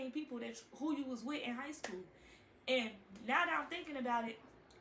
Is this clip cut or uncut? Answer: uncut